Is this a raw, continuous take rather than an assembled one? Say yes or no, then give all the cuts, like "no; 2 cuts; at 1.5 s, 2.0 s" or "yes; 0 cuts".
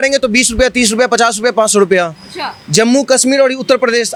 yes; 0 cuts